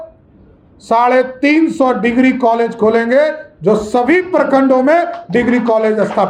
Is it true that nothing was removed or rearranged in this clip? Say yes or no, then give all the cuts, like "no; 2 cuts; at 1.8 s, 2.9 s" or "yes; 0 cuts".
yes; 0 cuts